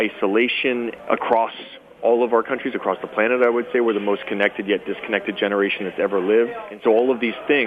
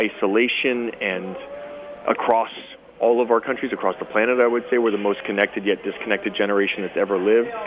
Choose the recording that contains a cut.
first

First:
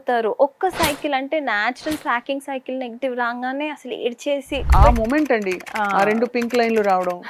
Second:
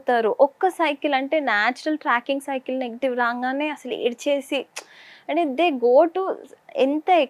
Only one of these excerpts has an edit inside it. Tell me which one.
first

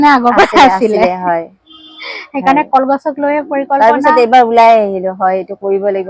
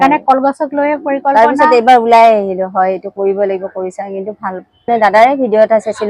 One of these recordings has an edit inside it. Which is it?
second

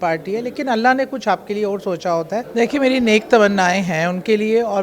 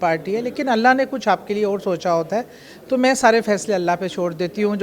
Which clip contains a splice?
first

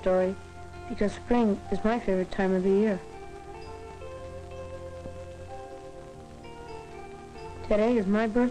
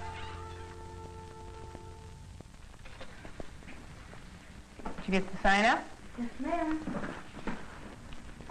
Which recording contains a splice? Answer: first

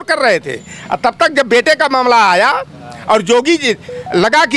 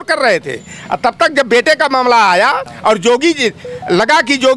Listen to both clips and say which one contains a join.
second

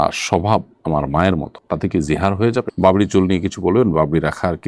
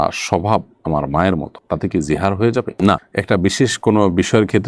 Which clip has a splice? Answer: first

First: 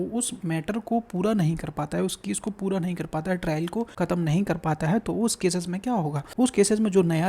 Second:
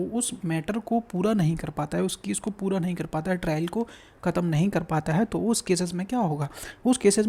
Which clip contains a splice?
first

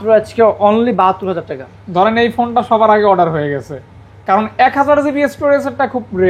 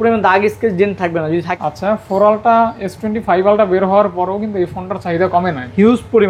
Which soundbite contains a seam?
second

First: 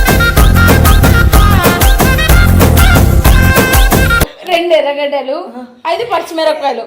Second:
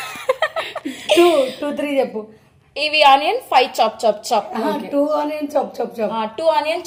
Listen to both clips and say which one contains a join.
first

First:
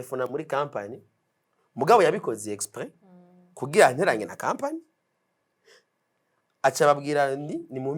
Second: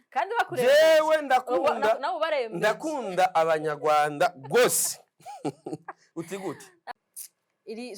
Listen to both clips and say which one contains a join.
second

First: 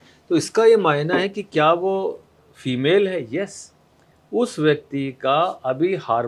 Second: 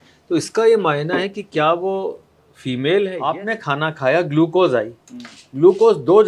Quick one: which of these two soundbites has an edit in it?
second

